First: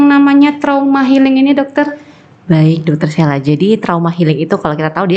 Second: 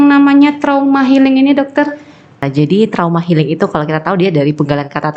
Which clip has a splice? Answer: second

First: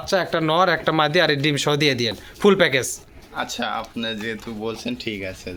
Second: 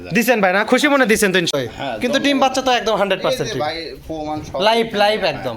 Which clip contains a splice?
second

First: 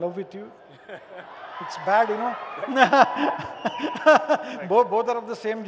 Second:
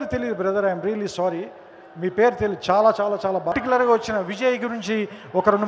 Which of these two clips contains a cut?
second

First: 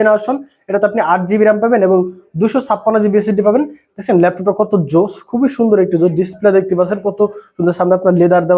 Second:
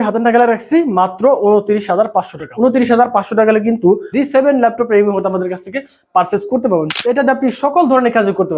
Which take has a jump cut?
second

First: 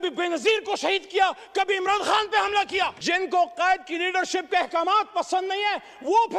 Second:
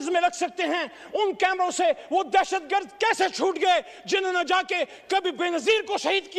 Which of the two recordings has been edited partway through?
first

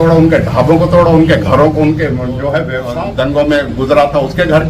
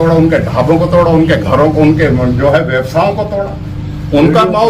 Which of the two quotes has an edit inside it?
first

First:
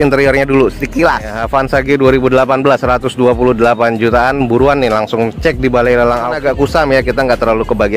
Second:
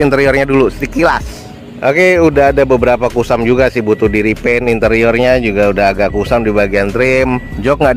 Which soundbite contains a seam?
first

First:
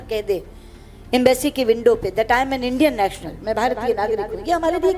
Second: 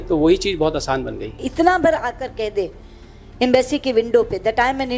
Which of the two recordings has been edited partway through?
second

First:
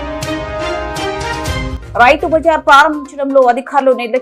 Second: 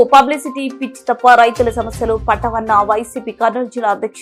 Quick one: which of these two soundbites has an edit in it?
first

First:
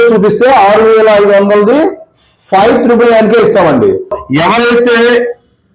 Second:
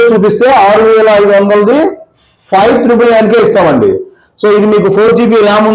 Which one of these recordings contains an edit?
first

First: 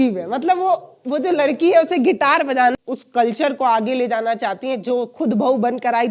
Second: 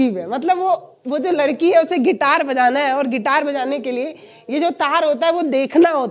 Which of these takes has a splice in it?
first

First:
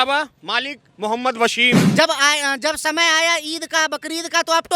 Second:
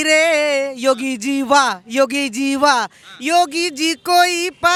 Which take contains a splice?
first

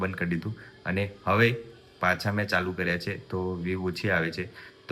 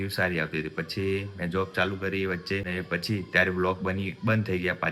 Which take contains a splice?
second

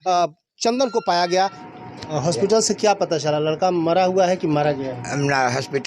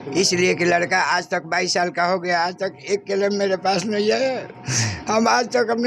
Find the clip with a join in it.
first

